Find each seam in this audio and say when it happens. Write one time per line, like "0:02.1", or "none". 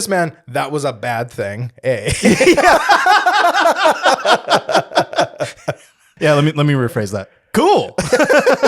0:06.1